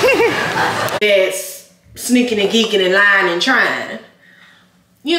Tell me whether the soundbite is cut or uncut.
cut